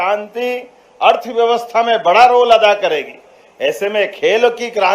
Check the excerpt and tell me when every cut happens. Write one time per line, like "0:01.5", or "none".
none